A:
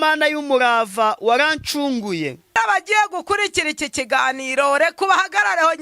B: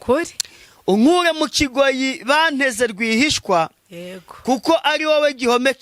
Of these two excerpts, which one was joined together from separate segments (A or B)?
A